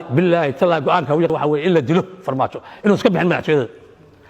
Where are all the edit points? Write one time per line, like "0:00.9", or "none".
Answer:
0:01.3

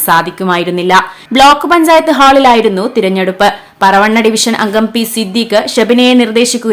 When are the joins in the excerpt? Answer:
0:01.2

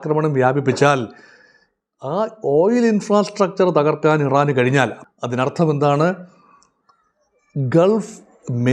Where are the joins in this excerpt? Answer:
0:05.0

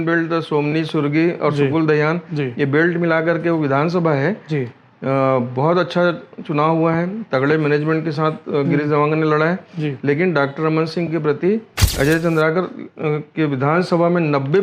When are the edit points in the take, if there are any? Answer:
0:11.8

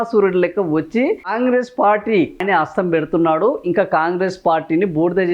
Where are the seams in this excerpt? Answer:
0:01.3
0:02.4

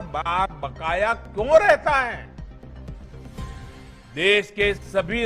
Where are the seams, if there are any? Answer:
0:02.8
0:04.1

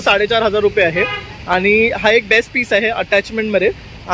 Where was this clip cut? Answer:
none

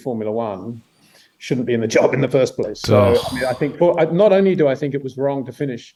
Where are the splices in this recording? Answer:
none

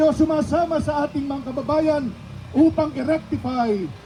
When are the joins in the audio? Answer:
none

